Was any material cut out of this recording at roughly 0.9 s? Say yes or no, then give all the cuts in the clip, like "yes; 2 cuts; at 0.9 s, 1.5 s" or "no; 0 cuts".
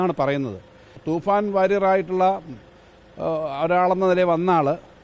yes; 1 cut; at 0.9 s